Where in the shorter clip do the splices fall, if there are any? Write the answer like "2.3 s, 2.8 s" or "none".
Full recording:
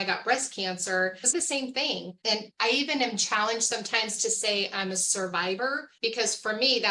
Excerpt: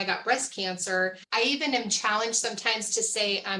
1.2 s